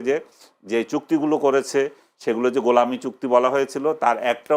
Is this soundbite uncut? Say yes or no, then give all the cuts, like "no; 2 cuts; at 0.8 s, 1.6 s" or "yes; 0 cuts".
yes; 0 cuts